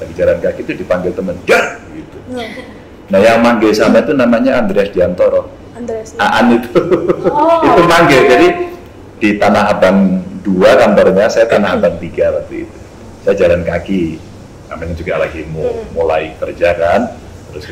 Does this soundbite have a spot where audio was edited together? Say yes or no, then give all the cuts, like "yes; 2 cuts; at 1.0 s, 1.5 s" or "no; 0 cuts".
no; 0 cuts